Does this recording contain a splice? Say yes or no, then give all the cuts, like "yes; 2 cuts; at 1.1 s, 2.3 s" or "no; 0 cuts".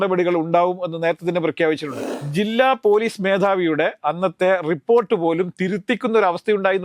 yes; 1 cut; at 1.9 s